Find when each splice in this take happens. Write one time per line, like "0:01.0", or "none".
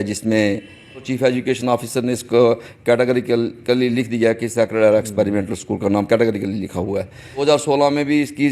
0:01.1
0:07.4